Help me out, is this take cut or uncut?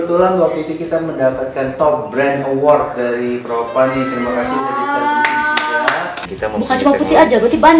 cut